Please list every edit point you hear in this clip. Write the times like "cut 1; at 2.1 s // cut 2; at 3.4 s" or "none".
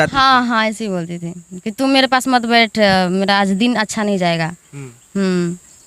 none